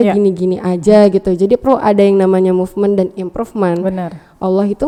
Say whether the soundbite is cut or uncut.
uncut